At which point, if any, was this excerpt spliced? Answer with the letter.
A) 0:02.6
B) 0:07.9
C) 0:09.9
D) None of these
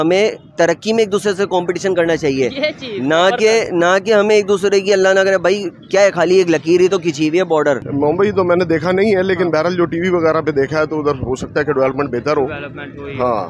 B